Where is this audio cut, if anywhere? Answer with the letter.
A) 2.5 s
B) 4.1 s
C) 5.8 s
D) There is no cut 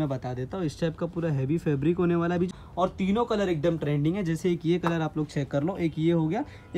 A